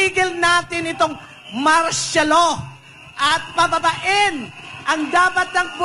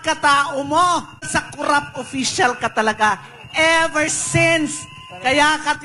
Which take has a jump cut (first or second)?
second